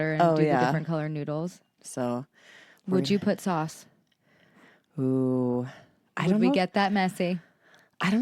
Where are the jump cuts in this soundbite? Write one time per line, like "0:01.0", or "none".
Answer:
0:01.7